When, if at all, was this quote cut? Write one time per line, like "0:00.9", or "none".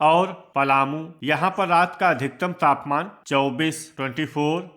0:01.0